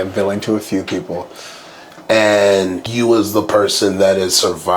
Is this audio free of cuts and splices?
no; 1 cut; at 2.8 s

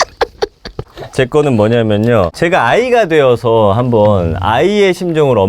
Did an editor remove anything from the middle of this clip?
yes; 2 cuts; at 0.9 s, 2.3 s

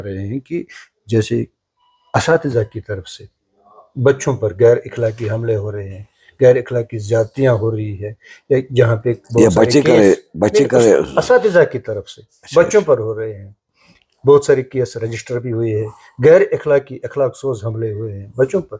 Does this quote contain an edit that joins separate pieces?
no; 0 cuts

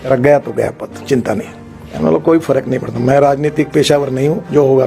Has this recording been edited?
yes; 1 cut; at 1.8 s

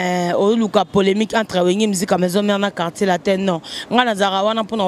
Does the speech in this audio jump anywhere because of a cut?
no; 0 cuts

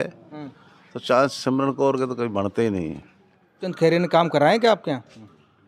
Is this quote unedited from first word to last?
no; 1 cut; at 3.7 s

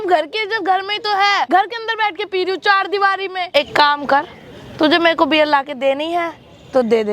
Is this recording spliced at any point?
yes; 2 cuts; at 1.5 s, 3.5 s

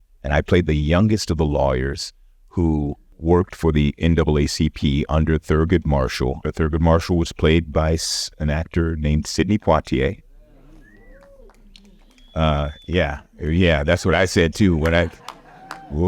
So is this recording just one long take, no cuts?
no; 2 cuts; at 3.1 s, 6.4 s

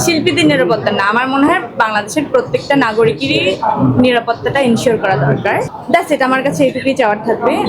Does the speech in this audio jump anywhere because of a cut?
yes; 1 cut; at 5.7 s

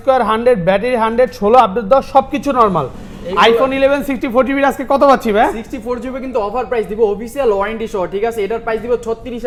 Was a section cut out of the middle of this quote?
no; 0 cuts

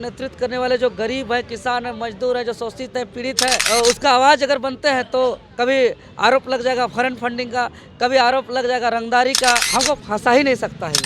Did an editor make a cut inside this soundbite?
yes; 2 cuts; at 3.6 s, 9.7 s

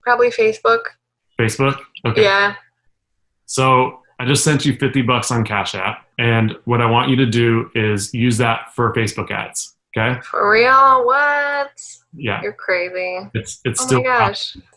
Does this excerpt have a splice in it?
no; 0 cuts

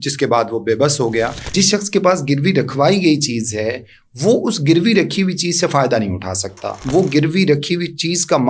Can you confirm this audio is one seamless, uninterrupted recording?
no; 2 cuts; at 1.5 s, 6.7 s

